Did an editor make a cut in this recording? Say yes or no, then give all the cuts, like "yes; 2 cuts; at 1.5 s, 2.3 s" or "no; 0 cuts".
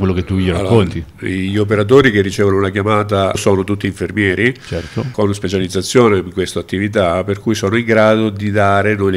yes; 1 cut; at 3.4 s